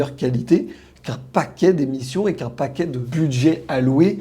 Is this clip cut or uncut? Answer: cut